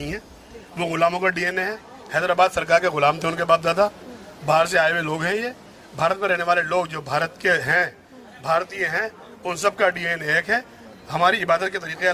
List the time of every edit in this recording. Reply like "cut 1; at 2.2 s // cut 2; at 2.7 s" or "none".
none